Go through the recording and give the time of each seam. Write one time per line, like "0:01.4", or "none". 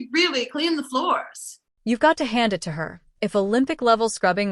none